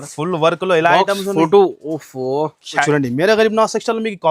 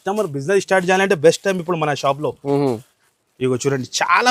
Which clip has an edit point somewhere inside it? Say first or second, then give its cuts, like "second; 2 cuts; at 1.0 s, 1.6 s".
first; 1 cut; at 2.8 s